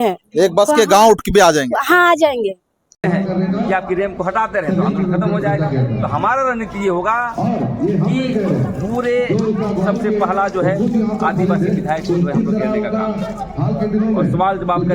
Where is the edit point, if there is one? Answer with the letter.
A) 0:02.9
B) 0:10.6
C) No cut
A